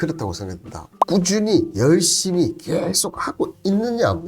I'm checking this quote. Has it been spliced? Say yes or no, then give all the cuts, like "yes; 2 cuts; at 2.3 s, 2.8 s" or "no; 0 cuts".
yes; 1 cut; at 0.9 s